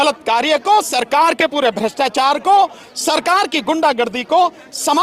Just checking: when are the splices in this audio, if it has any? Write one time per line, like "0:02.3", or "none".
none